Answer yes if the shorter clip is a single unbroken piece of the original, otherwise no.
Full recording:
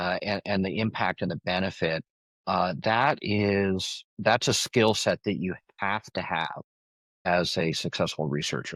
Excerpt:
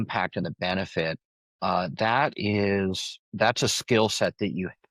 yes